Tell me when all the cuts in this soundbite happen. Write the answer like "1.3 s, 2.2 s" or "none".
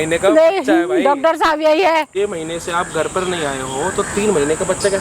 2.1 s